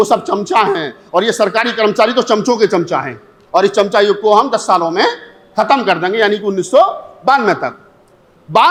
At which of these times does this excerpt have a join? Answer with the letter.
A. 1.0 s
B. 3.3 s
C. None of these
C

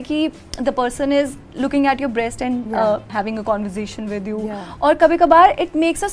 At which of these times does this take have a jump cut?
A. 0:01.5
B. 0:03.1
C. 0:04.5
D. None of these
B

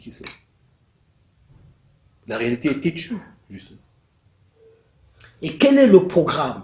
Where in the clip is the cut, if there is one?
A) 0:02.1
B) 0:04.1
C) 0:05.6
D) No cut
D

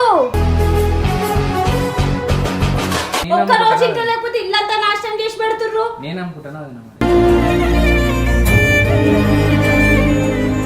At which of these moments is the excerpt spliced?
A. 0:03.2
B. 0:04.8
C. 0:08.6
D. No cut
A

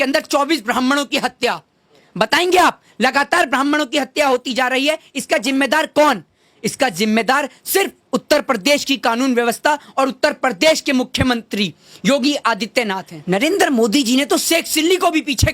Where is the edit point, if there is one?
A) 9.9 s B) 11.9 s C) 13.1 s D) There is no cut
C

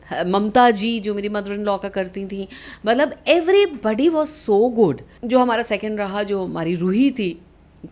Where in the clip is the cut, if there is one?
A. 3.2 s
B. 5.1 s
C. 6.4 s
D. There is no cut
B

